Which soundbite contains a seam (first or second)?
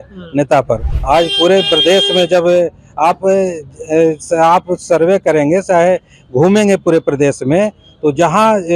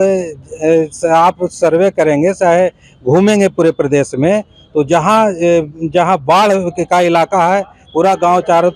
first